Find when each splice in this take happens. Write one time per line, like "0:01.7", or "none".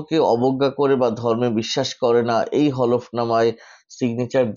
none